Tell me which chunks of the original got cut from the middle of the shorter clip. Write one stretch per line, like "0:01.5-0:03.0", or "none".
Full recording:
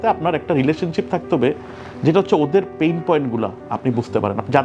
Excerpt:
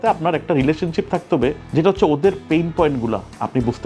0:01.6-0:01.9